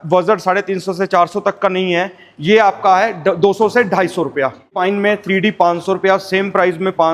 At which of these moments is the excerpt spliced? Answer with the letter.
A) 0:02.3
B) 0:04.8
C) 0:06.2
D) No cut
B